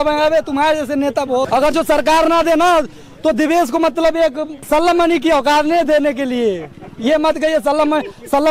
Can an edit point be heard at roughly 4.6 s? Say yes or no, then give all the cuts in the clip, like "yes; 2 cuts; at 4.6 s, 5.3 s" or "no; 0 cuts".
yes; 2 cuts; at 1.5 s, 4.6 s